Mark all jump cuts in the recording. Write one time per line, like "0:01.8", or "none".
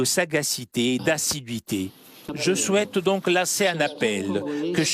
0:02.2